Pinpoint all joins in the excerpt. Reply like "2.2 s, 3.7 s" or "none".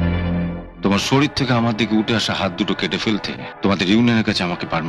3.4 s